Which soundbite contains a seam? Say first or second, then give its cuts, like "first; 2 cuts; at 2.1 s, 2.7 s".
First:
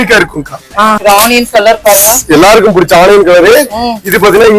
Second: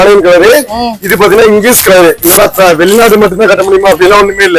first; 1 cut; at 1.0 s